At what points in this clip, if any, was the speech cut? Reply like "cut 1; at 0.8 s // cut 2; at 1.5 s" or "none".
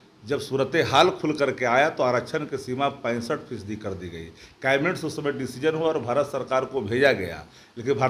none